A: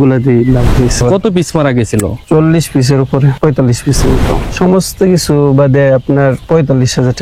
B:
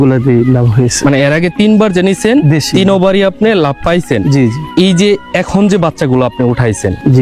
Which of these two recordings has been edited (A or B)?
A